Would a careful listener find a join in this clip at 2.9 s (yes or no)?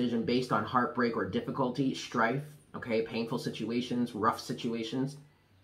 no